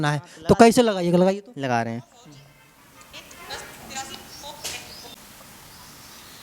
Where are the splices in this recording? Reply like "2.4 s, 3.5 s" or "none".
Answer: 5.2 s